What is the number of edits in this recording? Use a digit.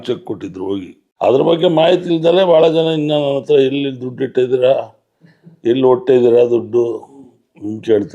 1